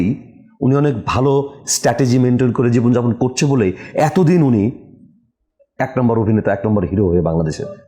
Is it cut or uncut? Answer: uncut